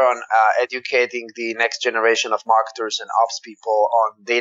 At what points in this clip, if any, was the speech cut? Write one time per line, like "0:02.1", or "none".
none